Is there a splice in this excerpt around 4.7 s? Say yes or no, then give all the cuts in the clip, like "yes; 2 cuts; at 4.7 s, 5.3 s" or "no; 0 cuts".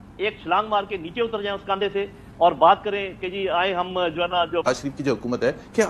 yes; 1 cut; at 4.7 s